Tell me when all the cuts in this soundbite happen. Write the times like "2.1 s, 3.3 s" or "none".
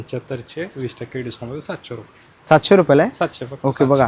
none

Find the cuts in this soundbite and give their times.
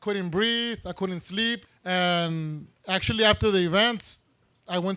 1.7 s

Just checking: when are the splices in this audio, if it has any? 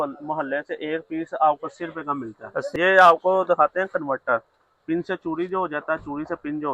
2.7 s

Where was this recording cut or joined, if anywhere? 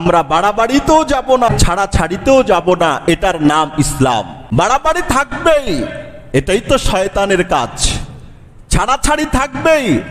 1.5 s, 4.4 s

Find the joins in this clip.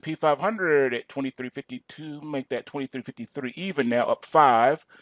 1.1 s

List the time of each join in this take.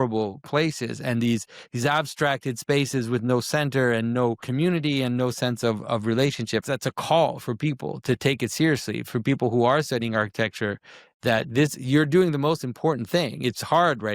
4.4 s, 6.6 s

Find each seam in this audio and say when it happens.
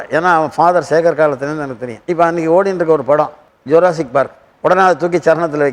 2.0 s

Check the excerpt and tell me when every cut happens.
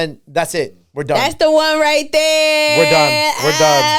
none

